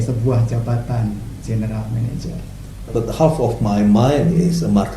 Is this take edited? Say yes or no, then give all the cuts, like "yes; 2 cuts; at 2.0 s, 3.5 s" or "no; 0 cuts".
yes; 1 cut; at 2.9 s